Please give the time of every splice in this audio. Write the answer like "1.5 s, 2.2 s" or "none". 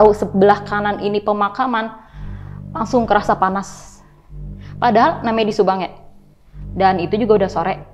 none